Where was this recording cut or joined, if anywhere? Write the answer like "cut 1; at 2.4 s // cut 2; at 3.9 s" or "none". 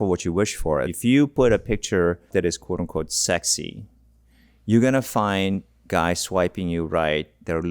cut 1; at 0.9 s // cut 2; at 2.3 s